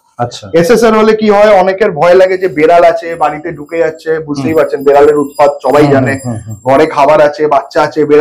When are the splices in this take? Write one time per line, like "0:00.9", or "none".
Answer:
none